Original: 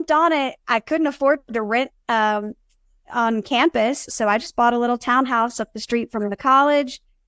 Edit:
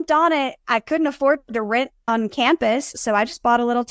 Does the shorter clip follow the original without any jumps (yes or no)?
no